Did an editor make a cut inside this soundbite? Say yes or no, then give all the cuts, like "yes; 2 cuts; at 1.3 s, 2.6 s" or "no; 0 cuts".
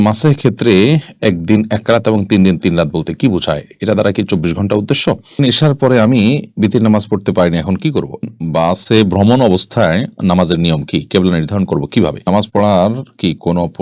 yes; 3 cuts; at 5.4 s, 8.3 s, 12.2 s